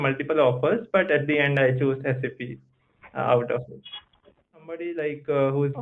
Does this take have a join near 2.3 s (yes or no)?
no